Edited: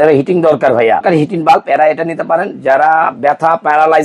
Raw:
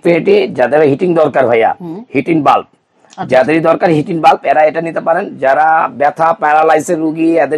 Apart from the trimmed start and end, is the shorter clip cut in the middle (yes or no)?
yes